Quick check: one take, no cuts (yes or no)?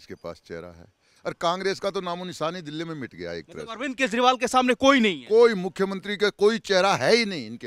no